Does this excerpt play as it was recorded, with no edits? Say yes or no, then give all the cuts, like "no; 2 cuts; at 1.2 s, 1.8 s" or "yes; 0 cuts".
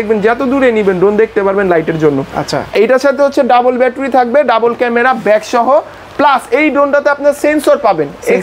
yes; 0 cuts